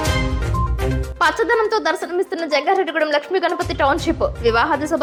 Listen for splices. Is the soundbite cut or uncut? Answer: uncut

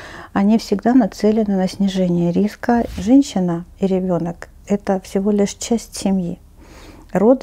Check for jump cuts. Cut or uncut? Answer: cut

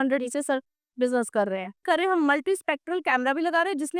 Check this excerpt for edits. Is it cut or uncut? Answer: cut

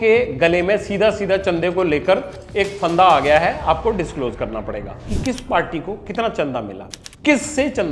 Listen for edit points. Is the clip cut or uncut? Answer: cut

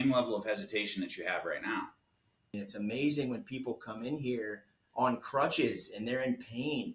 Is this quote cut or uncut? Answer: cut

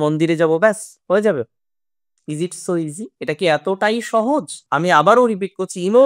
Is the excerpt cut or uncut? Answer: cut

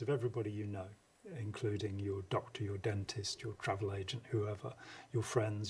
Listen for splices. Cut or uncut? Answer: uncut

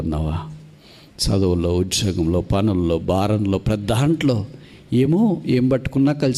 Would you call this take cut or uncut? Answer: uncut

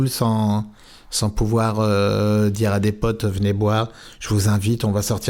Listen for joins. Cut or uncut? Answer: uncut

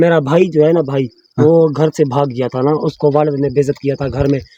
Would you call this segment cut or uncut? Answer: uncut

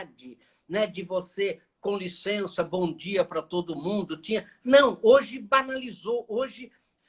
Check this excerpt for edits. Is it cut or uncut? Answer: uncut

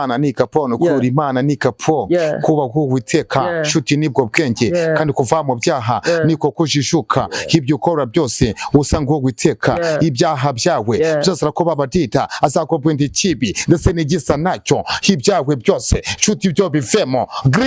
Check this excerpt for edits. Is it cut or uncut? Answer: uncut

